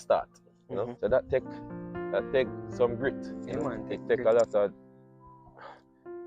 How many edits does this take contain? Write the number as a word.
one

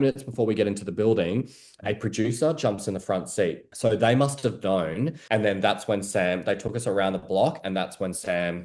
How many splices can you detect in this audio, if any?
two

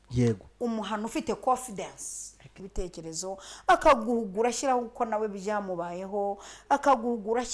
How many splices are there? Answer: one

